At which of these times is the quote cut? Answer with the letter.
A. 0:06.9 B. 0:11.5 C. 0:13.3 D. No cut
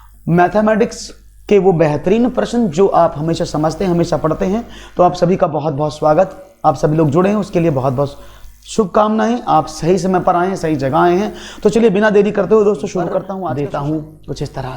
C